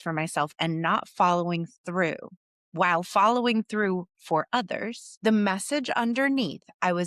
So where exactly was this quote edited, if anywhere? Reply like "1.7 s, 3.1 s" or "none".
5.0 s